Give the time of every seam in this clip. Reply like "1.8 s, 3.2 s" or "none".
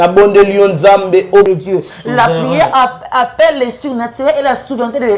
1.5 s